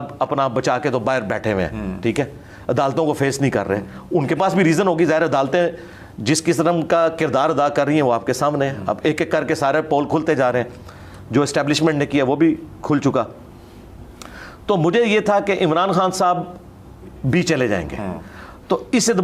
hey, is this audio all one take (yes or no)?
yes